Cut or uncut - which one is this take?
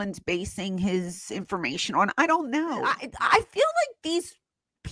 cut